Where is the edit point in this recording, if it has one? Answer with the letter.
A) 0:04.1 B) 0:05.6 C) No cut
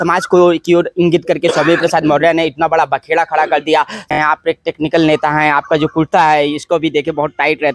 A